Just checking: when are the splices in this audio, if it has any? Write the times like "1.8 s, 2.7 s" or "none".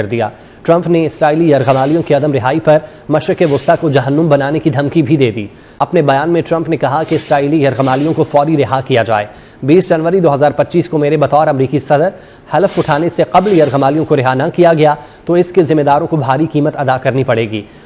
none